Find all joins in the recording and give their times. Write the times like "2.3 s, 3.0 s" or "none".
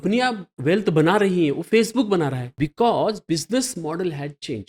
2.5 s

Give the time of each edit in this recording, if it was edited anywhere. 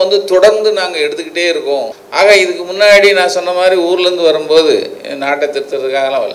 2.0 s

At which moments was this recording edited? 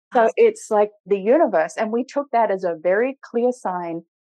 1.0 s

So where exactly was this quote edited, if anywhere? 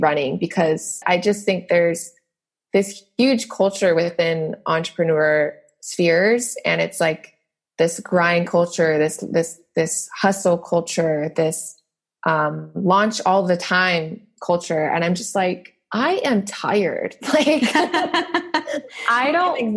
1.0 s

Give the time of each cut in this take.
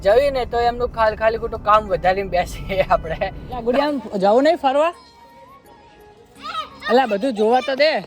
3.4 s

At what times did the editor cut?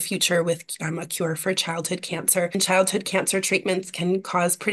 2.6 s

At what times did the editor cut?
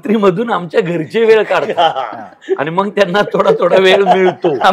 none

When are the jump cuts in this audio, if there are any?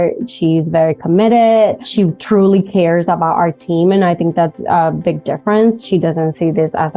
1.9 s

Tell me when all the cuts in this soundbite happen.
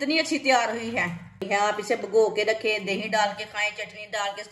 1.4 s

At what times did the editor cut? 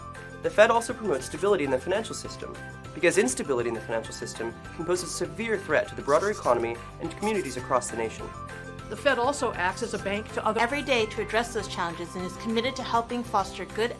10.6 s

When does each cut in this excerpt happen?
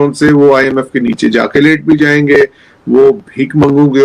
none

